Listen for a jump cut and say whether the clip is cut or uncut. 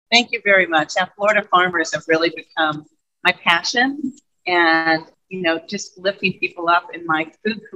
uncut